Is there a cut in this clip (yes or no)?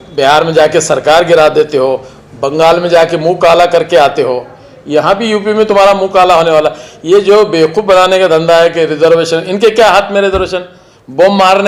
no